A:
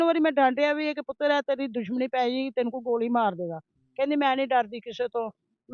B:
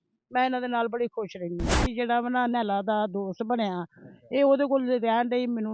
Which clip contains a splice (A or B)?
B